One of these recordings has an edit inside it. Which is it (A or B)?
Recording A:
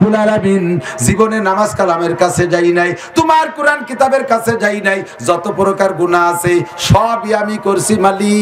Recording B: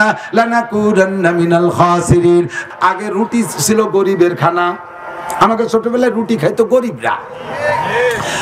B